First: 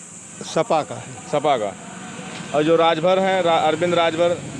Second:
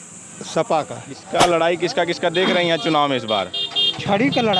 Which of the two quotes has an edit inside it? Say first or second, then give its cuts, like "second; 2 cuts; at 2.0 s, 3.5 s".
second; 1 cut; at 1.2 s